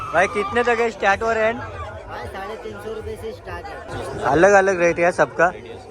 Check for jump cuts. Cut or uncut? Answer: cut